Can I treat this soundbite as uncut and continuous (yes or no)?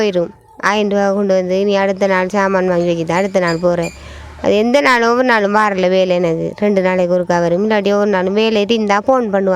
yes